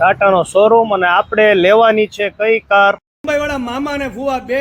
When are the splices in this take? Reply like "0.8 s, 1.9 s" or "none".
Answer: 3.2 s